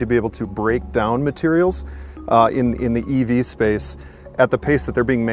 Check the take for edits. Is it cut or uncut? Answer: uncut